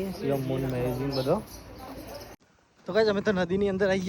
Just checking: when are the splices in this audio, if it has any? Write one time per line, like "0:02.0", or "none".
0:02.3